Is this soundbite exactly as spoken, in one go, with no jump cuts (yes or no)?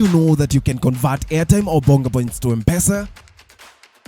yes